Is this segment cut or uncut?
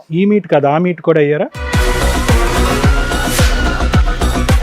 uncut